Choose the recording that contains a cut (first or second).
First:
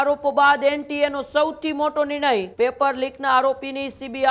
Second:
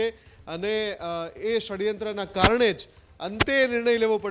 first